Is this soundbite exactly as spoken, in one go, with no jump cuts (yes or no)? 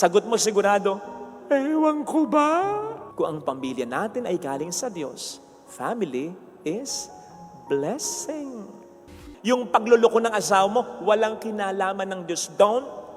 no